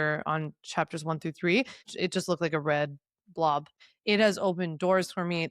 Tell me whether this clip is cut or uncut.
cut